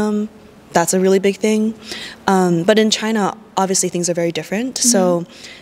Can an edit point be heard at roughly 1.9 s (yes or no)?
no